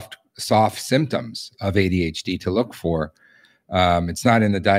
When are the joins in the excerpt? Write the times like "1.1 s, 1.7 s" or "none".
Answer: none